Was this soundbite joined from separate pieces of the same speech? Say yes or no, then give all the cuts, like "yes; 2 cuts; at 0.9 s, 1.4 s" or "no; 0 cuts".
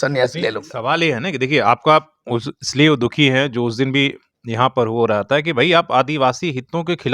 no; 0 cuts